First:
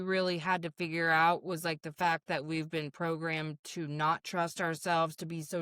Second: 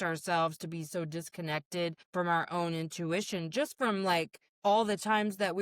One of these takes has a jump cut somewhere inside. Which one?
second; 2 cuts; at 2.0 s, 4.4 s

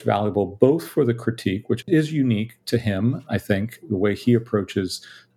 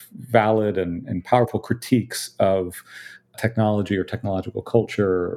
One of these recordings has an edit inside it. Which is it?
first; 1 cut; at 1.8 s

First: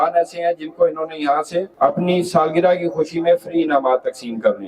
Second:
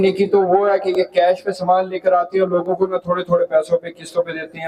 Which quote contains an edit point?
first; 1 cut; at 1.7 s

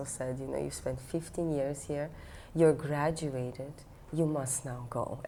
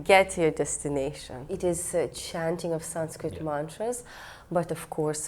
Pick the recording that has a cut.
second; 1 cut; at 1.5 s

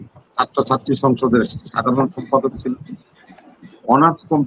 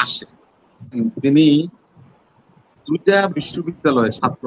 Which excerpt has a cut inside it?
second; 1 cut; at 1.0 s

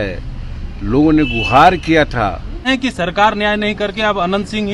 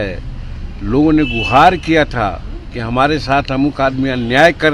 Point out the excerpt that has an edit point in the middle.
first; 1 cut; at 2.7 s

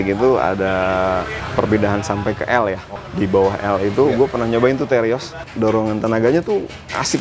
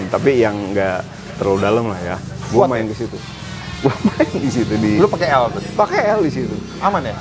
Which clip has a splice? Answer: first; 3 cuts; at 1.4 s, 2.9 s, 5.4 s

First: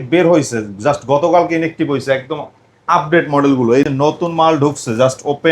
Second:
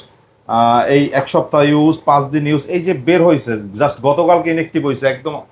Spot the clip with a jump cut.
first; 1 cut; at 3.9 s

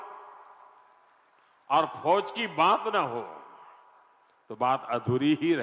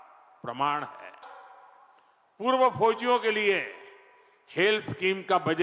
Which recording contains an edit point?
second; 1 cut; at 1.2 s

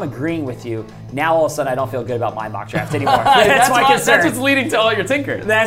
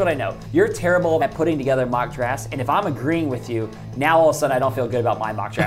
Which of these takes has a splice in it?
second; 1 cut; at 1.2 s

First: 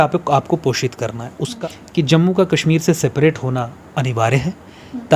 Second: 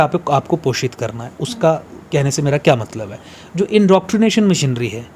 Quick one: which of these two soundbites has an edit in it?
first; 1 cut; at 1.5 s

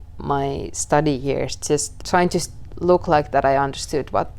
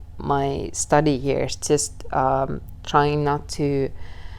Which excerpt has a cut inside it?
first; 1 cut; at 1.9 s

